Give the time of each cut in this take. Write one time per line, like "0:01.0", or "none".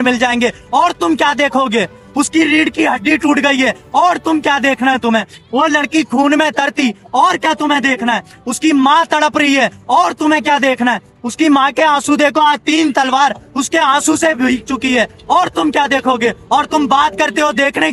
none